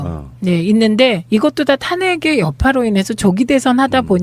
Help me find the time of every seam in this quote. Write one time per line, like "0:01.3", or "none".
0:02.0